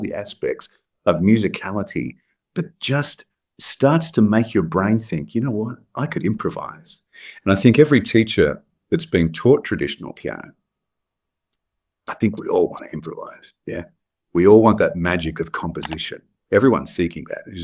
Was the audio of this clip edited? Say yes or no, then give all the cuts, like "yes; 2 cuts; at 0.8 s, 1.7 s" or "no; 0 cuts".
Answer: no; 0 cuts